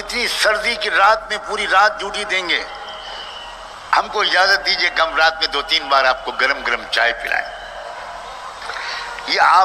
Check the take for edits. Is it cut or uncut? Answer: uncut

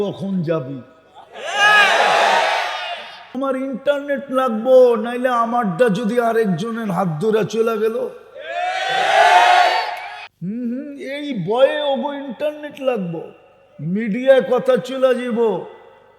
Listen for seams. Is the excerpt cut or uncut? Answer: cut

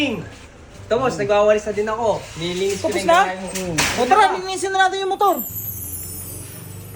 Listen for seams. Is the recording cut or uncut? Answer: cut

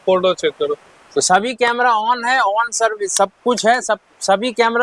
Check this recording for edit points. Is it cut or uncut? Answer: uncut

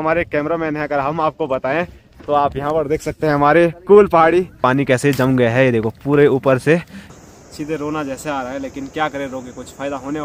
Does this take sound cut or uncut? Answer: cut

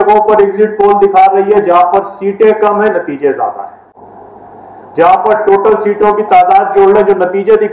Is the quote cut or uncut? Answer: uncut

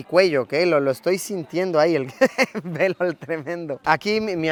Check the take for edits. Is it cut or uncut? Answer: uncut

